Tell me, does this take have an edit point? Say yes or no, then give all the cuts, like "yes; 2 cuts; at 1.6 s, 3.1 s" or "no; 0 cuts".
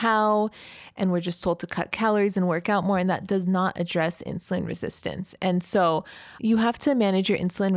no; 0 cuts